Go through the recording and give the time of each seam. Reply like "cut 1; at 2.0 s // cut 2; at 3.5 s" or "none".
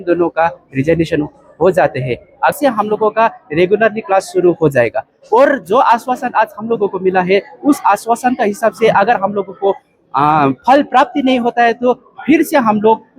cut 1; at 2.5 s